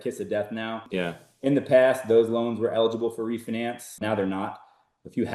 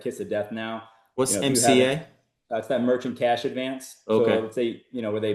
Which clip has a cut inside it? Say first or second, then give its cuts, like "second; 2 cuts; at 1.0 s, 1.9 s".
first; 2 cuts; at 0.9 s, 4.0 s